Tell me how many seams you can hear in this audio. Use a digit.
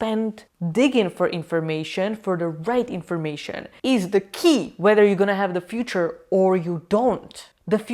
0